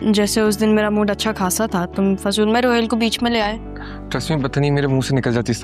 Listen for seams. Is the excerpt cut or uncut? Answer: uncut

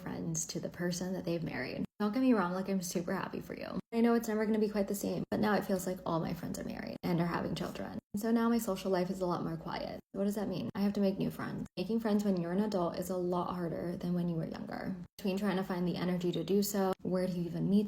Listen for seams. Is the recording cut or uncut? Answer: cut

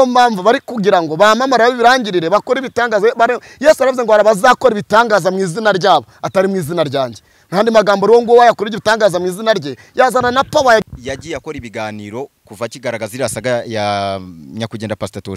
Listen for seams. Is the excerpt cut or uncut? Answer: cut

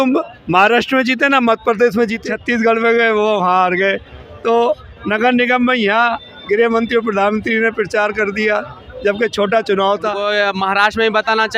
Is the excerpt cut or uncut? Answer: cut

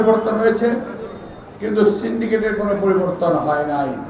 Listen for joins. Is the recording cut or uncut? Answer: uncut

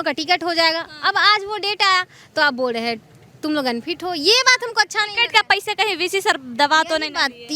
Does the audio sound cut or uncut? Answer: uncut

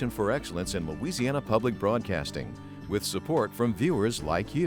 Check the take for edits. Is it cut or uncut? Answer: uncut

